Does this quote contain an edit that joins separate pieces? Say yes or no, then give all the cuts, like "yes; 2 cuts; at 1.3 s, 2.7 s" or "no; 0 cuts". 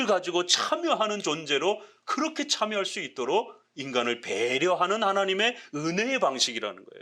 no; 0 cuts